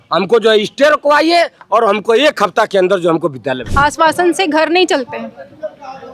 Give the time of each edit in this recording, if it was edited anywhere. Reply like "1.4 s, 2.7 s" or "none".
3.5 s